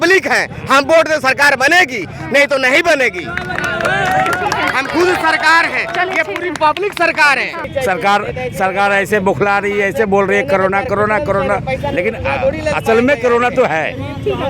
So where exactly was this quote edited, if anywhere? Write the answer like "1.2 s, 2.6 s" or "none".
none

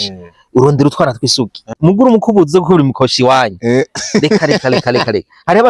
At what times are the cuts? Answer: 1.7 s

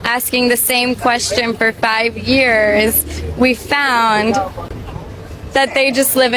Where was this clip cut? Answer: none

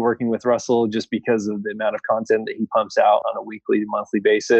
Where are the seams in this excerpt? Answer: 3.3 s

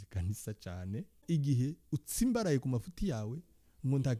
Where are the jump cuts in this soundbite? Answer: 1.2 s

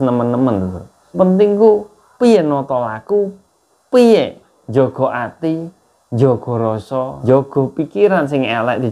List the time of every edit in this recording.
1.1 s, 7.1 s

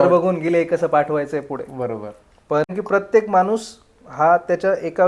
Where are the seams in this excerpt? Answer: 2.7 s

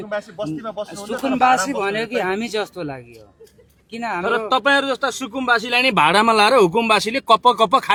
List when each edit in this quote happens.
none

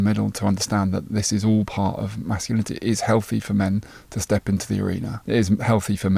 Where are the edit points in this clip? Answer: 5.1 s

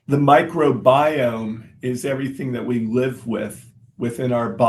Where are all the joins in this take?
none

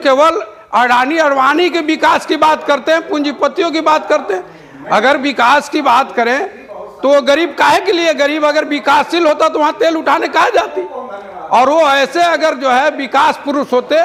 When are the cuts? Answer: none

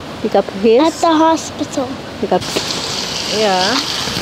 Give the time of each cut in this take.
2.4 s

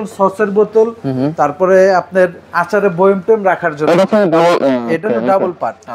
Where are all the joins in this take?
none

